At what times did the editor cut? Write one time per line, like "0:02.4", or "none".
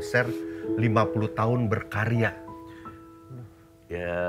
none